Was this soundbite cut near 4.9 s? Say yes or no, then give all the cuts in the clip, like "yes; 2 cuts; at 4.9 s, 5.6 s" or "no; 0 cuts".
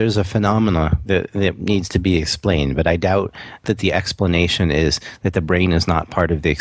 no; 1 cut; at 3.6 s